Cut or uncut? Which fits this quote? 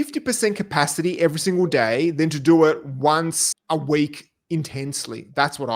cut